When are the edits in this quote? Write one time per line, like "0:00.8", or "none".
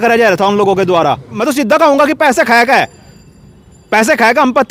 0:01.3